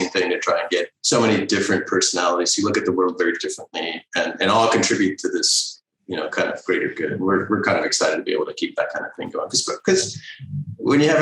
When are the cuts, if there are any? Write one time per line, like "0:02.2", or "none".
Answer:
0:01.0